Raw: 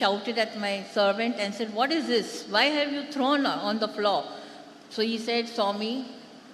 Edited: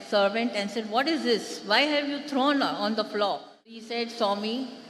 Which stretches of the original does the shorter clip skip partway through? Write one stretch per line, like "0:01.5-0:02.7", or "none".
0:04.7-0:05.2